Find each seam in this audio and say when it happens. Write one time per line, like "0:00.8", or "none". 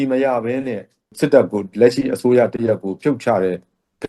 0:01.1

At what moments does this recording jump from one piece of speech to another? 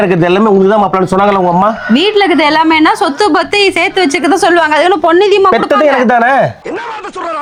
none

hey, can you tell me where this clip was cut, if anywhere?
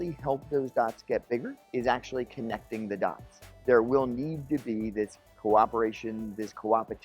0:01.6
0:03.3

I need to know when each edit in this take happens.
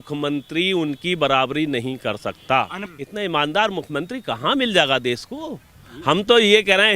0:02.8

